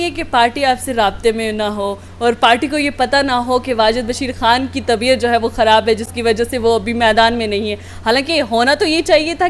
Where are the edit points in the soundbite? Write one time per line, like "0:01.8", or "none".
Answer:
none